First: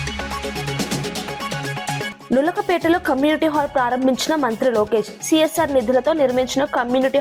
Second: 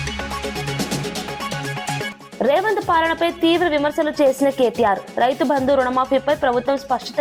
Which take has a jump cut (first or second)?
first